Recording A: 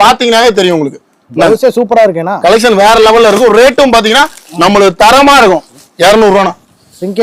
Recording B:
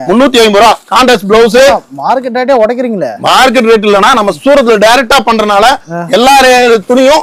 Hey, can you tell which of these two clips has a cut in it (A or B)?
A